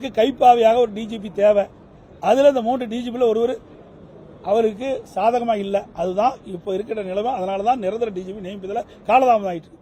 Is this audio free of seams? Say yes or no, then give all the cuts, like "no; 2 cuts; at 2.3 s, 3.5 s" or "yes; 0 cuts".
yes; 0 cuts